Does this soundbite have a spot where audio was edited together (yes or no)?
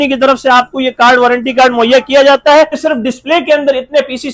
yes